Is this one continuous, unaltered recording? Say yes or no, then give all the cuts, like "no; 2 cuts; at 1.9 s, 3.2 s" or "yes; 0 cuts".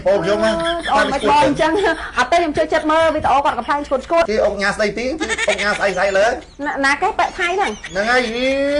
no; 2 cuts; at 4.3 s, 6.5 s